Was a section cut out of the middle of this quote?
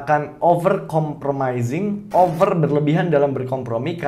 yes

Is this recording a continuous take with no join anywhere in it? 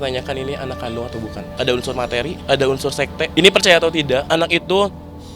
no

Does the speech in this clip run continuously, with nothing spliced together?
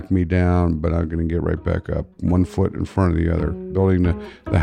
no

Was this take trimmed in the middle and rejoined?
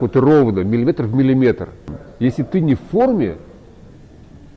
yes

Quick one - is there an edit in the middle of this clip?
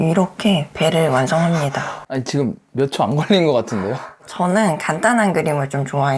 no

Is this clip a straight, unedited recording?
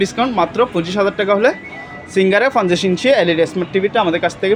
yes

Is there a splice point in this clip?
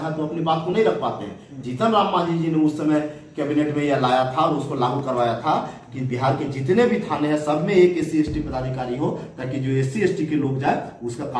no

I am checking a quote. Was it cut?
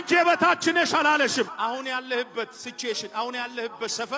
yes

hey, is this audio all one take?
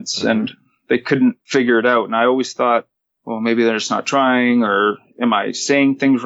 no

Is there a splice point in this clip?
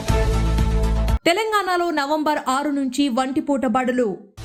no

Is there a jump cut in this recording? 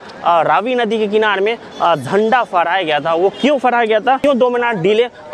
yes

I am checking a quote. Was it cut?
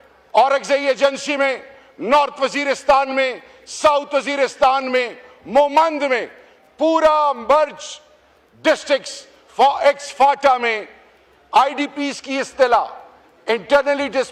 no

